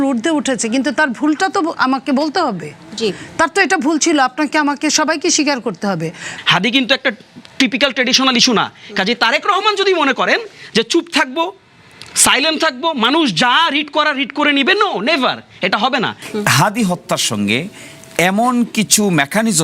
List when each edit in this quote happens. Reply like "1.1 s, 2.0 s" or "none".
6.3 s, 16.2 s